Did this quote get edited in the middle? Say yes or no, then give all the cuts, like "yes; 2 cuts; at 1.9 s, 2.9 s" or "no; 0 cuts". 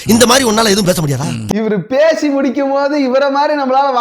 yes; 1 cut; at 1.5 s